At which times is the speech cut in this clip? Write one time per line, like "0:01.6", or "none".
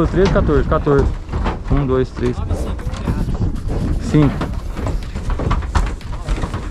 none